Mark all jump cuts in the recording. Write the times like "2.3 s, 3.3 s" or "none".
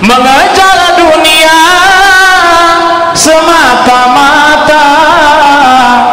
none